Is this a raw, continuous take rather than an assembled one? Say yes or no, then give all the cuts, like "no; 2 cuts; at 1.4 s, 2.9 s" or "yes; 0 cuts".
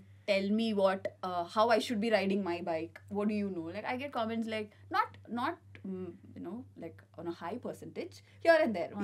yes; 0 cuts